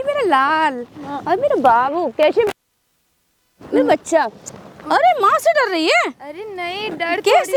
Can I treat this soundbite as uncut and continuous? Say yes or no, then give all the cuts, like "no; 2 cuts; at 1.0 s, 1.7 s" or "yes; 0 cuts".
yes; 0 cuts